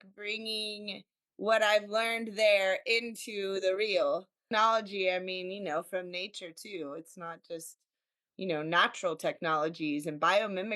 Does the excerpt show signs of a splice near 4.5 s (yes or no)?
yes